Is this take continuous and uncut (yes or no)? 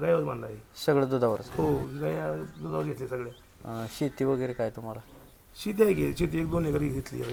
yes